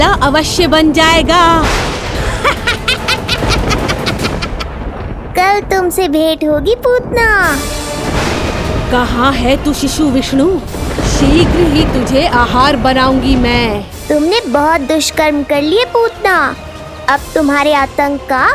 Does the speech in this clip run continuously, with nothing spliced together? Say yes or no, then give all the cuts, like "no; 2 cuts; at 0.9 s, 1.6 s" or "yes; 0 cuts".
yes; 0 cuts